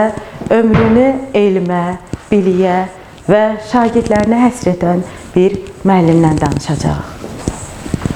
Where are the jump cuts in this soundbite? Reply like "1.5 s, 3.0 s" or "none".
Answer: none

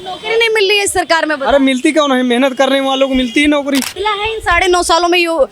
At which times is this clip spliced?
3.9 s

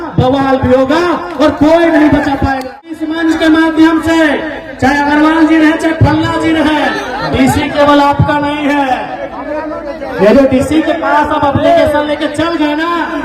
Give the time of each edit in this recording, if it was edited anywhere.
2.8 s

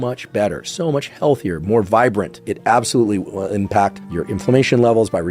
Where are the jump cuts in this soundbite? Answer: 2.4 s

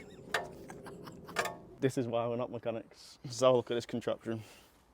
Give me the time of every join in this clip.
1.7 s

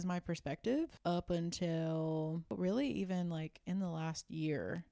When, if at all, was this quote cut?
0.9 s, 2.5 s

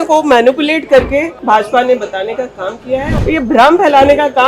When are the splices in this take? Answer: 1.3 s, 3.1 s

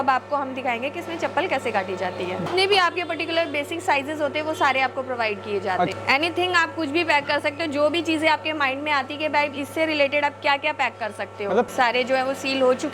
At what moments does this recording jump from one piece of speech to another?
2.5 s, 5.9 s, 11.7 s

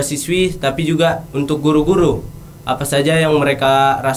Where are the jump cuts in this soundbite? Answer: none

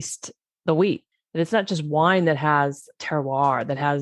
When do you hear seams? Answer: 1.1 s

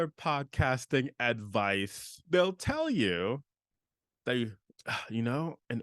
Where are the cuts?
2.1 s

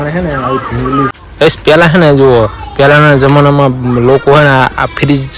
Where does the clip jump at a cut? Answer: 1.1 s

